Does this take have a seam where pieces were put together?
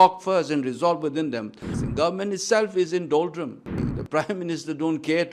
yes; 2 cuts; at 1.7 s, 3.8 s

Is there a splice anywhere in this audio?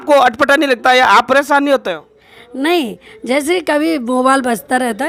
no; 0 cuts

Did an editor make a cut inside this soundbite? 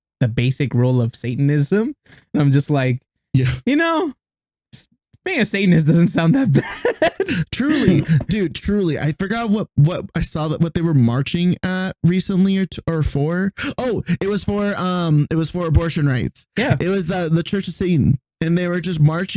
no; 0 cuts

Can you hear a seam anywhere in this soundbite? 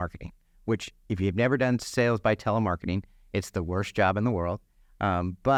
no; 0 cuts

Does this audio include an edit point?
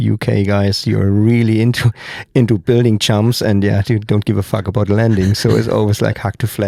no; 0 cuts

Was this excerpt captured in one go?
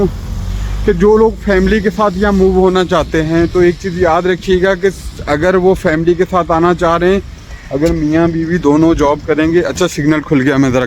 yes; 0 cuts

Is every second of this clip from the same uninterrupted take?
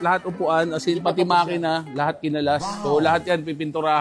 yes; 0 cuts

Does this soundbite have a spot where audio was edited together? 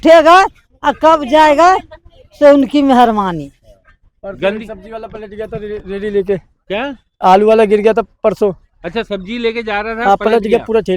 no; 0 cuts

